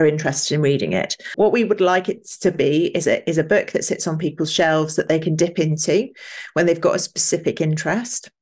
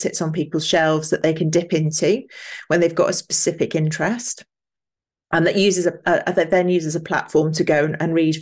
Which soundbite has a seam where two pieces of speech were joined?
first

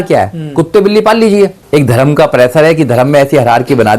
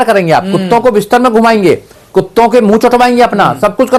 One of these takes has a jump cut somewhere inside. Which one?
first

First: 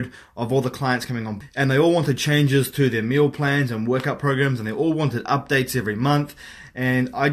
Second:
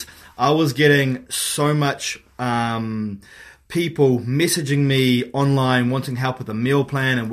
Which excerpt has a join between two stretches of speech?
first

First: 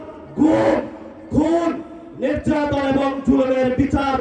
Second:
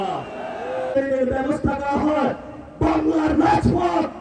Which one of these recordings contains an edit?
second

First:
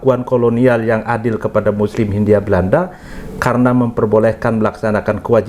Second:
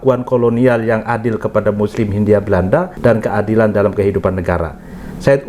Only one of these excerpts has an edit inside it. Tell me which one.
second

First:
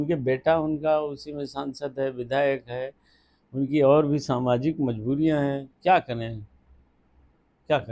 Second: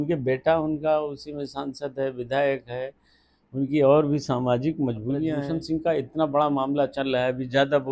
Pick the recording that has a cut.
second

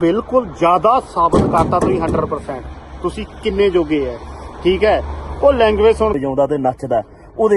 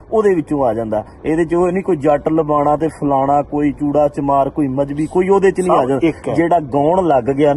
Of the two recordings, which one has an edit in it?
first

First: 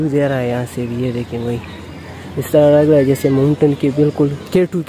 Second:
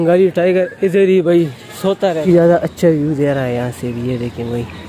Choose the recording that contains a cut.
second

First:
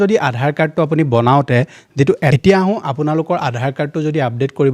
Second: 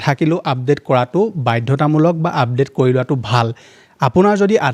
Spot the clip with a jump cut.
first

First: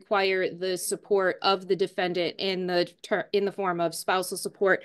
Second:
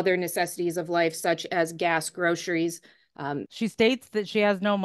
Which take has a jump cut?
second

